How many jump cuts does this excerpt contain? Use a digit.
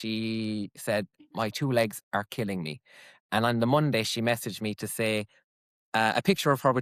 0